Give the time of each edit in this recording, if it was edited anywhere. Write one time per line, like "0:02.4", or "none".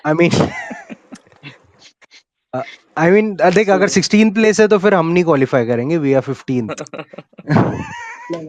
none